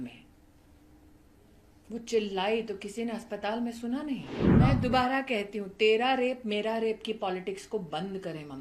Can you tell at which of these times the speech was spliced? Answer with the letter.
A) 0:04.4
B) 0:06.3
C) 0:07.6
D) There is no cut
A